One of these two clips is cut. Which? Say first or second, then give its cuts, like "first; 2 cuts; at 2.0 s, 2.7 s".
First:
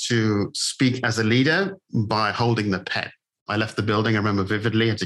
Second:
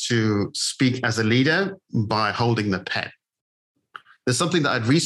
first; 1 cut; at 3.4 s